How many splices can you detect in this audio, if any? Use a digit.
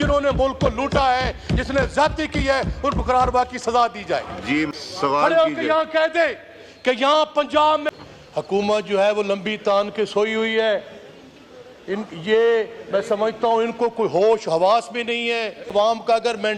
3